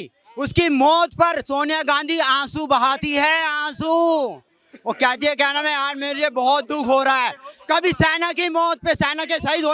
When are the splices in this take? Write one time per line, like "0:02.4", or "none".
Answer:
none